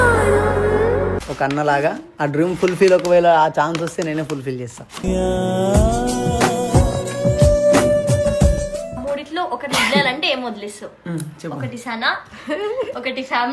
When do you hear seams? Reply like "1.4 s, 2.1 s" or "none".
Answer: 1.2 s, 9.0 s